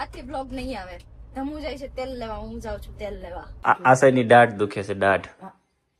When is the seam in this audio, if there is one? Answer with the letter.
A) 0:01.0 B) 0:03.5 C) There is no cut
B